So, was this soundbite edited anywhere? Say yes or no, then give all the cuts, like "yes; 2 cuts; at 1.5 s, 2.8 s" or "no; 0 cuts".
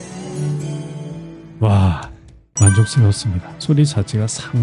yes; 1 cut; at 3.5 s